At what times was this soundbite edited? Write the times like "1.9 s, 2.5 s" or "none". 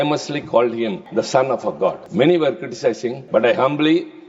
1.0 s, 2.0 s, 3.1 s